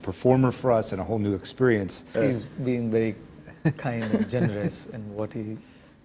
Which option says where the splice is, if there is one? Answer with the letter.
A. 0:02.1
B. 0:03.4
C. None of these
A